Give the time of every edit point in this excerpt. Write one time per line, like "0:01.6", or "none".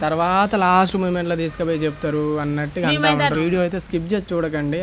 0:03.3